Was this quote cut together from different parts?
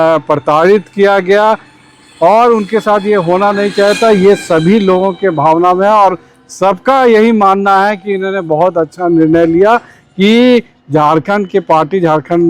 no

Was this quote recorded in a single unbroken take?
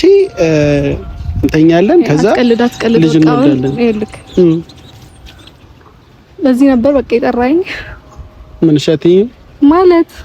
yes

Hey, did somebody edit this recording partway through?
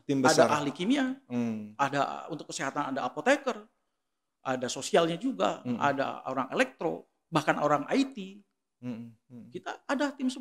no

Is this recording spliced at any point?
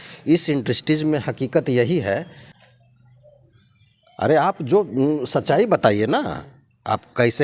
yes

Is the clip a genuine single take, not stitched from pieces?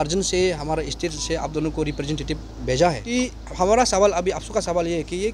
no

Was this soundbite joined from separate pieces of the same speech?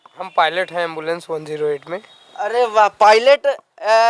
no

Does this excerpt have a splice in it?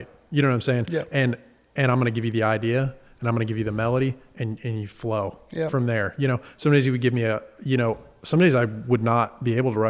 no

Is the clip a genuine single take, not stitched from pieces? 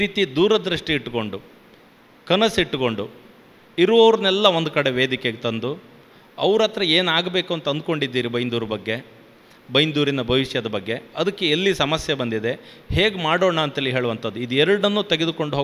yes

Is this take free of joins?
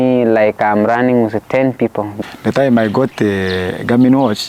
no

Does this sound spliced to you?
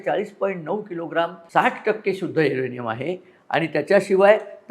yes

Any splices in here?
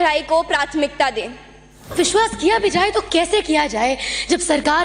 yes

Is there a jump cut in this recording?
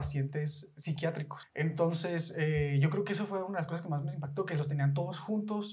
yes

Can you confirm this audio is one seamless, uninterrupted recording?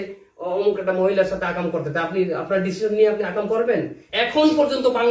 no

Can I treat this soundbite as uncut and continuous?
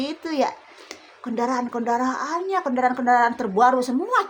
yes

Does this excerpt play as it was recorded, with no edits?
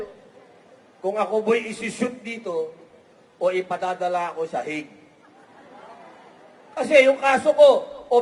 yes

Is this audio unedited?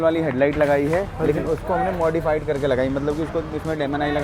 yes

